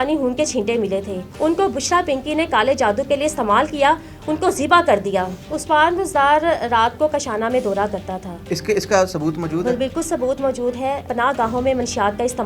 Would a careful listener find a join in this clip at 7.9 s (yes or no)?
no